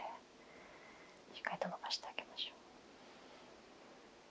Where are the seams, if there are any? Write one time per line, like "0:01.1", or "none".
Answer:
none